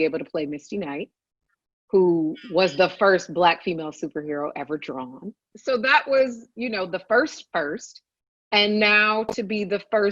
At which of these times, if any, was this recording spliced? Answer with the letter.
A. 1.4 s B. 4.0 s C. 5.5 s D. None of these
C